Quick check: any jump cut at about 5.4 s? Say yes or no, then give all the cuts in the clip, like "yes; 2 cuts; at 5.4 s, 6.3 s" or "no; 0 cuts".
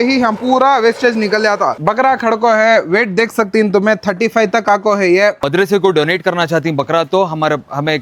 yes; 2 cuts; at 1.8 s, 5.4 s